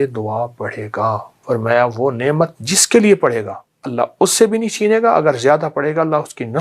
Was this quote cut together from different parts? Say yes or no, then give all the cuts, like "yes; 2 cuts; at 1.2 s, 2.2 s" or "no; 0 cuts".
yes; 1 cut; at 1.3 s